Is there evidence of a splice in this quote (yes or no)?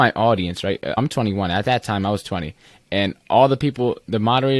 yes